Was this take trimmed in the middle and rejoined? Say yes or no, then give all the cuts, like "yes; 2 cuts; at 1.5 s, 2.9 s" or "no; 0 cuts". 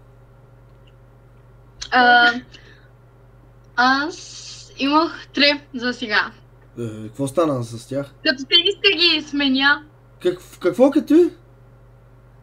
no; 0 cuts